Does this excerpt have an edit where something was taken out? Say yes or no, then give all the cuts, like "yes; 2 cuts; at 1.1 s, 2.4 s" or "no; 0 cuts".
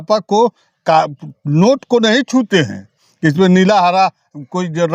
no; 0 cuts